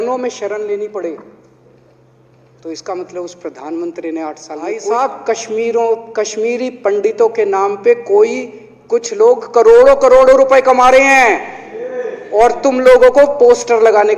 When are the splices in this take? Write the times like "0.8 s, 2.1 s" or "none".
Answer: 4.8 s